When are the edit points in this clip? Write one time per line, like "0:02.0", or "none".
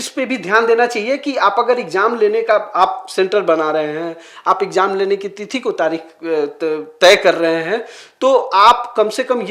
none